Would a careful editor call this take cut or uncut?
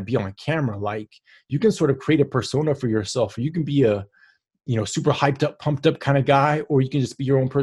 uncut